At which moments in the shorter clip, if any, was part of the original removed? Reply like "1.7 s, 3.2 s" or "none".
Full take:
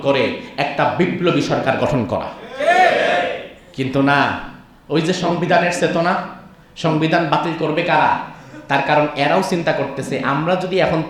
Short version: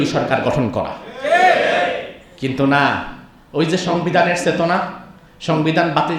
none